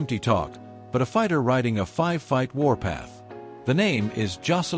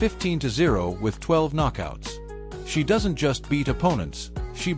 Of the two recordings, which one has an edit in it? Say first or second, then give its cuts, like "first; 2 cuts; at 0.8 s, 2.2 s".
first; 1 cut; at 1.1 s